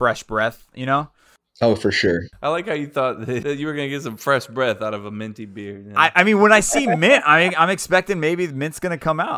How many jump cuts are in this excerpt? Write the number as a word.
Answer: two